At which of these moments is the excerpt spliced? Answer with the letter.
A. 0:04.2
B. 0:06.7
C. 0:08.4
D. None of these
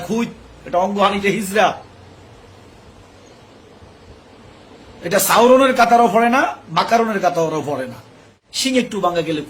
C